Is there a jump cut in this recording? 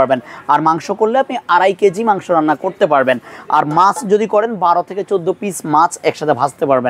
no; 0 cuts

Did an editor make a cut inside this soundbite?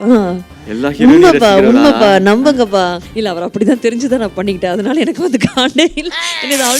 yes; 1 cut; at 3.1 s

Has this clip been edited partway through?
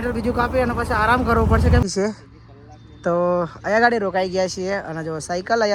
yes; 1 cut; at 1.8 s

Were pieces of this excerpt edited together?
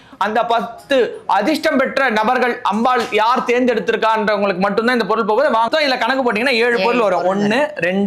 yes; 1 cut; at 5.7 s

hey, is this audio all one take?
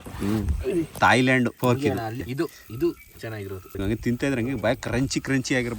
no; 3 cuts; at 0.9 s, 2.1 s, 3.7 s

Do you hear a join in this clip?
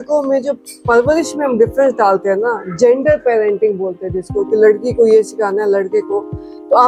no; 0 cuts

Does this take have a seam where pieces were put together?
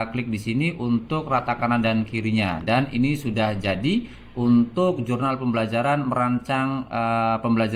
no; 0 cuts

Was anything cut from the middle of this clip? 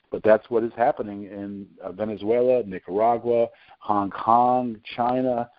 no; 0 cuts

